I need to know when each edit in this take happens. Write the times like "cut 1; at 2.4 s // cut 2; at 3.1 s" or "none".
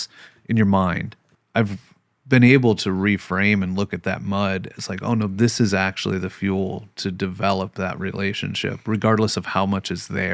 cut 1; at 1.3 s